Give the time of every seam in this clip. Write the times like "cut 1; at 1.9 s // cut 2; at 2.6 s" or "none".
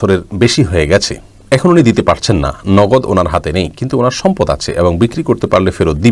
none